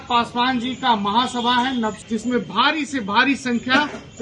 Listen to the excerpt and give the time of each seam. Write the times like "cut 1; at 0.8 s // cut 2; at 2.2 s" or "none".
cut 1; at 2.0 s